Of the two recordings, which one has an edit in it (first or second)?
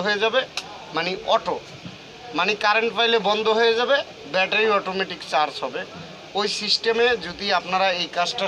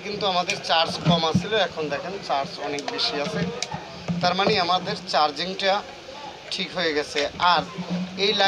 second